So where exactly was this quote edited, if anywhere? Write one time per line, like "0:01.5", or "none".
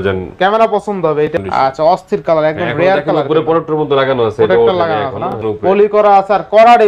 0:01.3
0:05.4